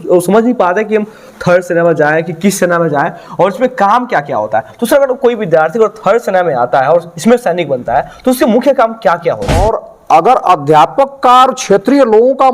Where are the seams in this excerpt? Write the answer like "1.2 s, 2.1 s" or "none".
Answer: 9.5 s

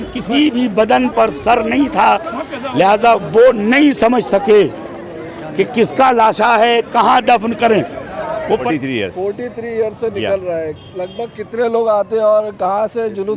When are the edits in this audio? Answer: 8.6 s

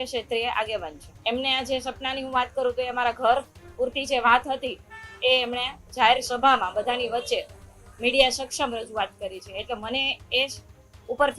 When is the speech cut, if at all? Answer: 1.0 s

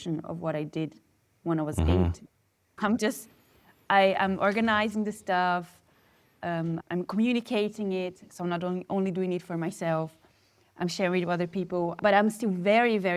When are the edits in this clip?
2.7 s, 12.0 s

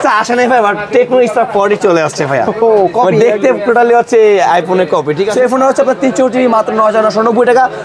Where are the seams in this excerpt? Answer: 5.3 s

